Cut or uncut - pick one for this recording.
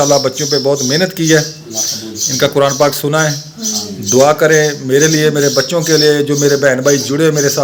uncut